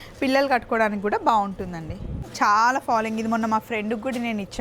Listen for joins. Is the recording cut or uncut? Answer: cut